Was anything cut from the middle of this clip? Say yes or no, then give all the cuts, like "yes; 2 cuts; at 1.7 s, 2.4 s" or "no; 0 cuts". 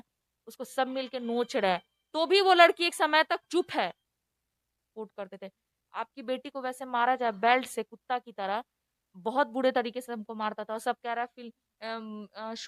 yes; 1 cut; at 4.9 s